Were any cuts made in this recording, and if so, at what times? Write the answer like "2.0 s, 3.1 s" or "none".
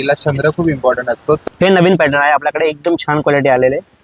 1.4 s